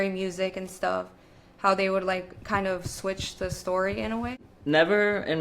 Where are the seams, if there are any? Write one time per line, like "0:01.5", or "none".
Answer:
0:04.5